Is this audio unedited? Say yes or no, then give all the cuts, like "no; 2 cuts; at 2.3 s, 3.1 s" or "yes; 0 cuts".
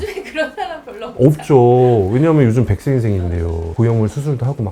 no; 1 cut; at 3.7 s